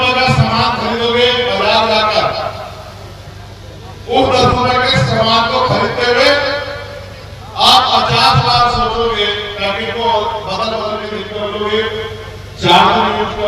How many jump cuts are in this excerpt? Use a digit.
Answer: 1